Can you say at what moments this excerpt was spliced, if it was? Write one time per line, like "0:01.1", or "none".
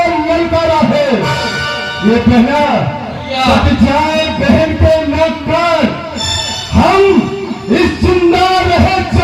none